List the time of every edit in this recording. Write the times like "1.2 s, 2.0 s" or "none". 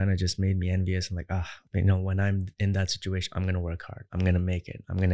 1.6 s